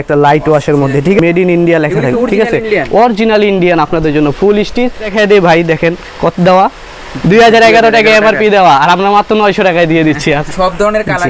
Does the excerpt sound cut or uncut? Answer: cut